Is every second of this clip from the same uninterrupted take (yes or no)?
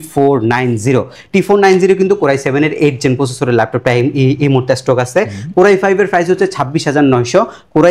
yes